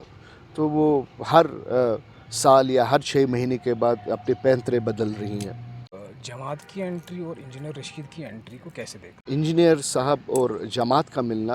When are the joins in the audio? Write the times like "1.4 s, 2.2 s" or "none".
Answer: 6.0 s, 9.2 s